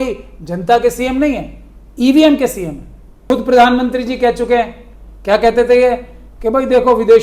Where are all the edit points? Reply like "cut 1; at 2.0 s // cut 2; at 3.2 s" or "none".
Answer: cut 1; at 3.3 s